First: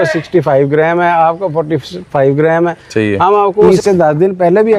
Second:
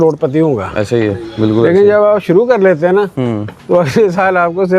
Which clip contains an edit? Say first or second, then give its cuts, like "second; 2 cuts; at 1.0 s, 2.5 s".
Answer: first; 1 cut; at 3.7 s